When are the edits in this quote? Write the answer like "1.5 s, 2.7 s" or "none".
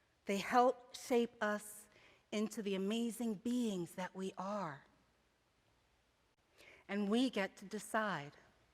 5.7 s